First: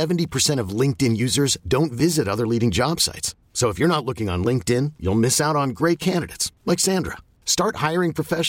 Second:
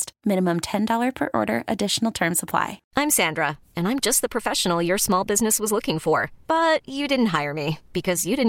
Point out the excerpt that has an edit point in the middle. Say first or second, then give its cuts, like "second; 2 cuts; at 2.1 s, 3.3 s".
second; 1 cut; at 2.8 s